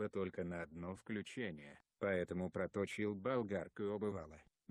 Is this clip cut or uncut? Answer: uncut